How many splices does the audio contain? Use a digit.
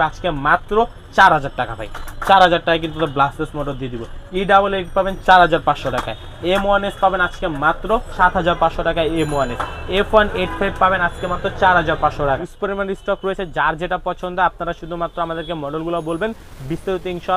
2